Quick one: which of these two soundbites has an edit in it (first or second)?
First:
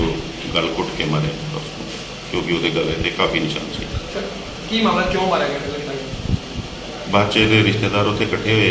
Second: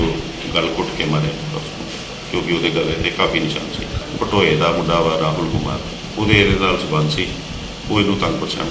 second